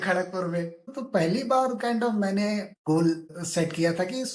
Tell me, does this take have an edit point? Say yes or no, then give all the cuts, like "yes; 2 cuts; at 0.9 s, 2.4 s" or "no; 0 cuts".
yes; 3 cuts; at 0.9 s, 2.7 s, 3.3 s